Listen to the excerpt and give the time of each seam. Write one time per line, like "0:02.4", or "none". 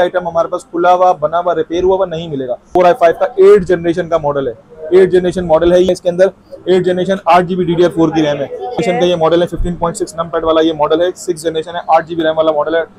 0:02.7
0:05.9
0:08.8